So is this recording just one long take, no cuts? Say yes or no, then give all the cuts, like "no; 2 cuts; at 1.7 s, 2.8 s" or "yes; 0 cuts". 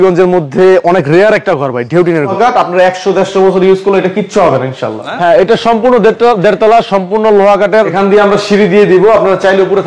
no; 3 cuts; at 2.3 s, 5.1 s, 7.9 s